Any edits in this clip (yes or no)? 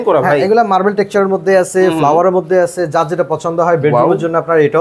no